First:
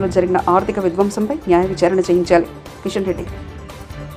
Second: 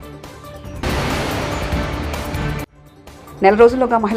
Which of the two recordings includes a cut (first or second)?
second